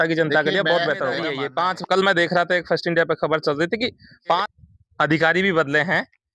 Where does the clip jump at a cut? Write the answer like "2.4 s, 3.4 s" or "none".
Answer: 1.3 s, 4.5 s